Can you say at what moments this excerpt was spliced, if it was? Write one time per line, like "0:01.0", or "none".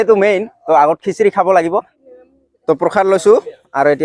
0:01.9